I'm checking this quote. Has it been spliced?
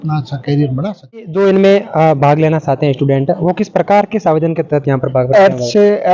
yes; 1 cut; at 1.3 s

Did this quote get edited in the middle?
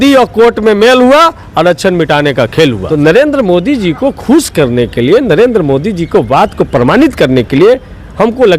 yes; 1 cut; at 2.8 s

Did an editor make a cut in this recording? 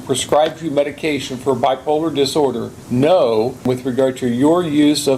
yes; 2 cuts; at 2.7 s, 3.6 s

